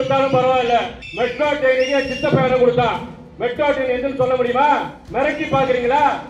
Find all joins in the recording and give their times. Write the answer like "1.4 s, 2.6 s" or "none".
1.0 s, 5.0 s